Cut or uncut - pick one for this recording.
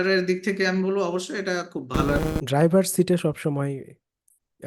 cut